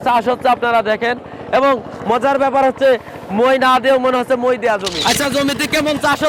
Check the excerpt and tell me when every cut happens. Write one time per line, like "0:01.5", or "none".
0:04.9

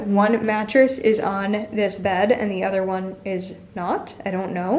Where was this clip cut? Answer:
none

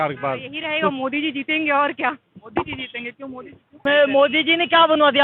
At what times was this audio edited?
0:00.9
0:03.8

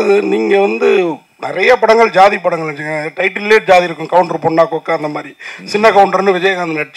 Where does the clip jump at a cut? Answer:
none

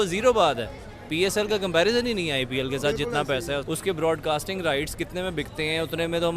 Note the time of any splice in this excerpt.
0:03.6

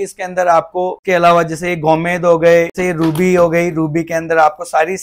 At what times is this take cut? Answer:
0:01.0
0:02.7

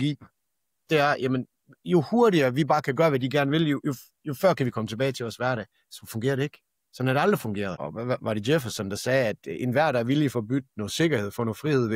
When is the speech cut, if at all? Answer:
0:07.8

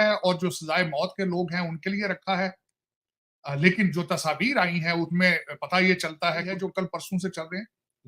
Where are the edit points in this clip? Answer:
0:06.7

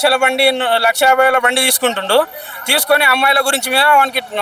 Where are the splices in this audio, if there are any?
none

